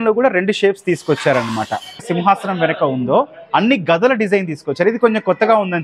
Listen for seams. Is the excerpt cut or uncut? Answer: cut